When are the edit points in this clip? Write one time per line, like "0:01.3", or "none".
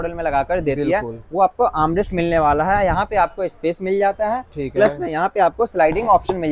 none